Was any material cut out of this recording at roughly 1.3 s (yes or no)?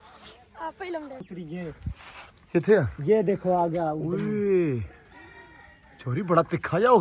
yes